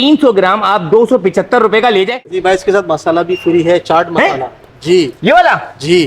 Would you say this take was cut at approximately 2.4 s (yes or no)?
yes